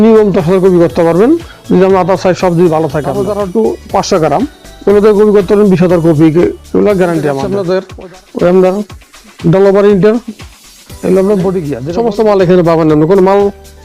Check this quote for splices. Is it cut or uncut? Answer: cut